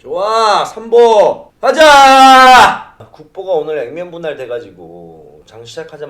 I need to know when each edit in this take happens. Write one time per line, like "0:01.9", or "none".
0:03.2